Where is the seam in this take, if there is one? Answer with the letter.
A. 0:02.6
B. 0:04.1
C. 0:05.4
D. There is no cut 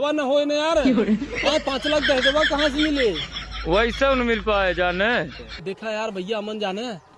C